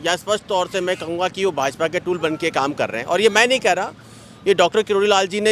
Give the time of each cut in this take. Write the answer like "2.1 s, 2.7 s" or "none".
none